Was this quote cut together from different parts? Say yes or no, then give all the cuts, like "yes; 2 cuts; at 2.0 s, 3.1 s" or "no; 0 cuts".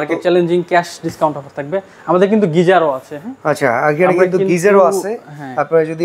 no; 0 cuts